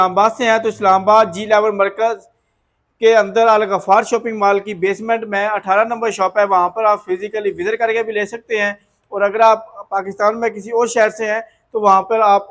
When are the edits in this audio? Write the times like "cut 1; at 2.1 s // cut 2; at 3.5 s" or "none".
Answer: none